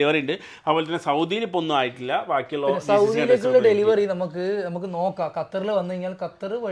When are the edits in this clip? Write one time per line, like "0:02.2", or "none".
none